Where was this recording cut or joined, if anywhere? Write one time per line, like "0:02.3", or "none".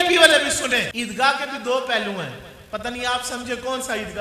0:00.9